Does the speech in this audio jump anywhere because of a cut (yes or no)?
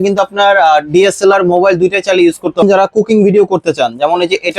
yes